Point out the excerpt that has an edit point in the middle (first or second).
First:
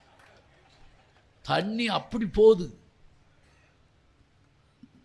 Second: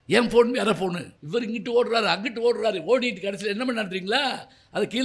second